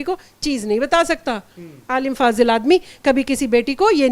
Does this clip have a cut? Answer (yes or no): no